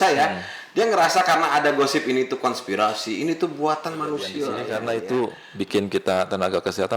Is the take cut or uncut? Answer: cut